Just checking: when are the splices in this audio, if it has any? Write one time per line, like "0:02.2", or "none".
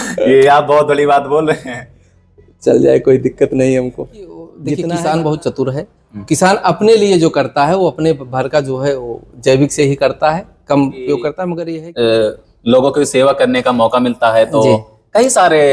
0:04.6
0:11.5